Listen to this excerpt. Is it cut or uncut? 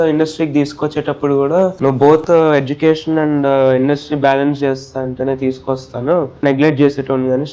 cut